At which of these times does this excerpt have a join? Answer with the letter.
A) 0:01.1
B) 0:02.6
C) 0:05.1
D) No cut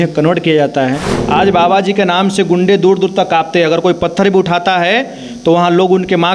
A